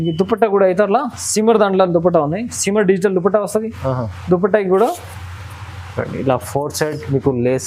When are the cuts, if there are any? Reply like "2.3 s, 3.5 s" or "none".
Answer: none